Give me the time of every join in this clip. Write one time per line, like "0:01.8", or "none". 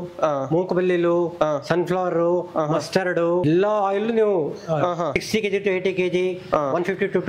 0:03.4
0:05.2